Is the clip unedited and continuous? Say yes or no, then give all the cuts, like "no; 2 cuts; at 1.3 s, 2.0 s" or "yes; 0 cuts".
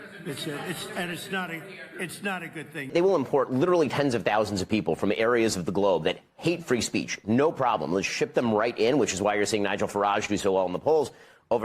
no; 1 cut; at 2.9 s